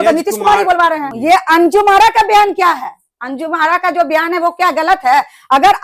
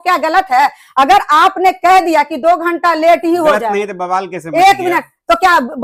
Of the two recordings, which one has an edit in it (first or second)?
first